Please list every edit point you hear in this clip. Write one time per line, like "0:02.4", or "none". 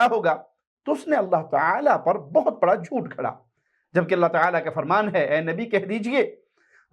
none